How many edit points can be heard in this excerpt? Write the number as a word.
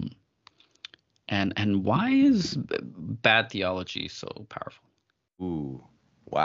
one